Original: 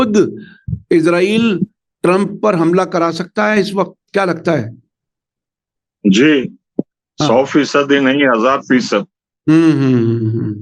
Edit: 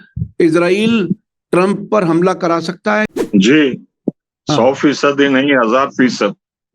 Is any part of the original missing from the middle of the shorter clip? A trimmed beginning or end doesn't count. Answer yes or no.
yes